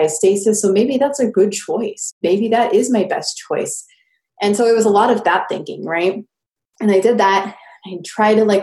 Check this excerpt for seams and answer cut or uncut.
cut